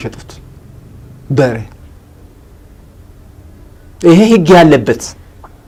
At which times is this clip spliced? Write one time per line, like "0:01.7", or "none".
none